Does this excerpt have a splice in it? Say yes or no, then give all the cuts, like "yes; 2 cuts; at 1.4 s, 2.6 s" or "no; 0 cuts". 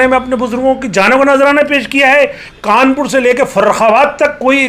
yes; 1 cut; at 2.4 s